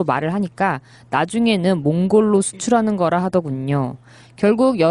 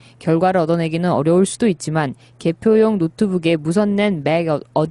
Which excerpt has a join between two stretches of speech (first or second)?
second